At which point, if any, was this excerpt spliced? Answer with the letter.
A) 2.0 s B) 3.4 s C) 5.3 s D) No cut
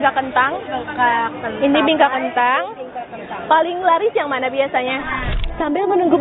C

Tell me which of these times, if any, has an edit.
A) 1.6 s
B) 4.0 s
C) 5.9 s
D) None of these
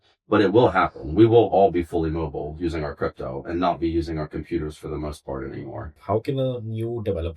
C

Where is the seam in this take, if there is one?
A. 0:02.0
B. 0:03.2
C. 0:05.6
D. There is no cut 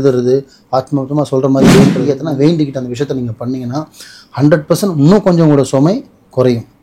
A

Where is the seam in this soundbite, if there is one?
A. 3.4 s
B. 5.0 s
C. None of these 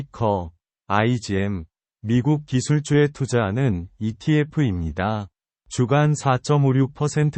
B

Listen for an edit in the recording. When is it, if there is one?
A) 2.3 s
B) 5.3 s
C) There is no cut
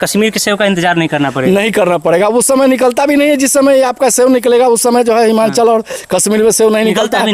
C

